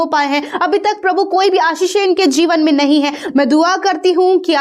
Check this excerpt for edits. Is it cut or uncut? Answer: cut